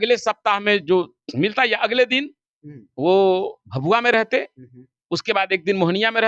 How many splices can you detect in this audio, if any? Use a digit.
0